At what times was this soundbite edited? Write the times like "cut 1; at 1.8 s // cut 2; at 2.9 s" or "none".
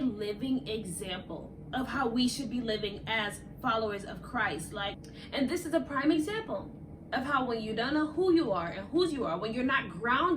cut 1; at 5.1 s